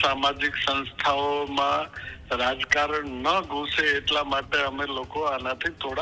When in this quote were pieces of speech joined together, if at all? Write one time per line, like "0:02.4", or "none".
none